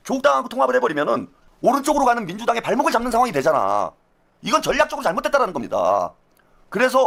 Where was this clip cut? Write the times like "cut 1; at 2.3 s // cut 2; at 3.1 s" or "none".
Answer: none